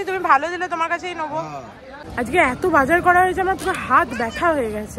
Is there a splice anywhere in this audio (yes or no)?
yes